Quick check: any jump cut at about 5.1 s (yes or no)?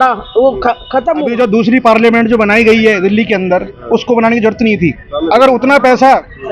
no